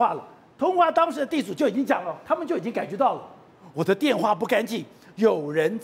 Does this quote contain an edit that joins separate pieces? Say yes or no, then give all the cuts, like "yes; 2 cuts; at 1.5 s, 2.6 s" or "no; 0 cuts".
no; 0 cuts